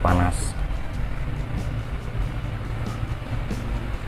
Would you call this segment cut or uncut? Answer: uncut